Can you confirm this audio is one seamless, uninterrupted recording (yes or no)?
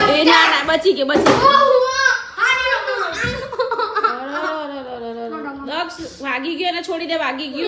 yes